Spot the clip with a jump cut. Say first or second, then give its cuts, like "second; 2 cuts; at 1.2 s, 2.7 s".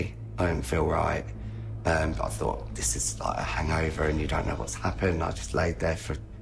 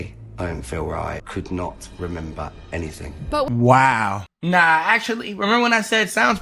second; 2 cuts; at 1.2 s, 4.3 s